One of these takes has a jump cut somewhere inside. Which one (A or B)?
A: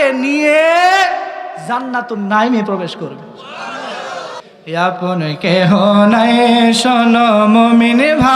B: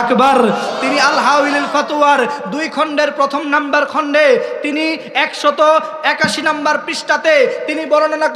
A